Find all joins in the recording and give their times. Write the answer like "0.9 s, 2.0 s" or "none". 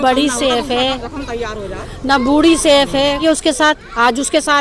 3.2 s